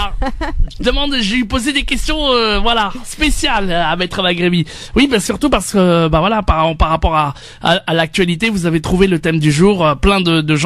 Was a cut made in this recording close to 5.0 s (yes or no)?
no